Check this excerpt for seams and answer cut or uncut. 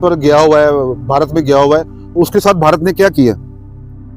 uncut